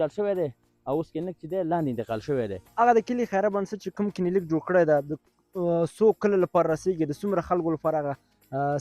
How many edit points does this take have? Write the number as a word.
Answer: one